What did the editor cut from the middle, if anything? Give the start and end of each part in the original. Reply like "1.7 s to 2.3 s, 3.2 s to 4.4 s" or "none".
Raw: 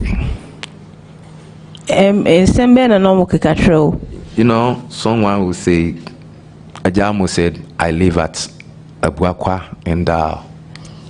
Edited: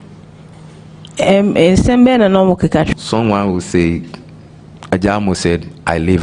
3.6 s to 4.8 s